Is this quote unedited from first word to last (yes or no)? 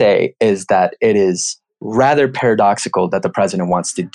yes